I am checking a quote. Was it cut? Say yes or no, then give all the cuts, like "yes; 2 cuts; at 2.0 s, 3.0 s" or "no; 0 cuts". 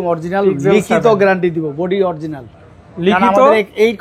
no; 0 cuts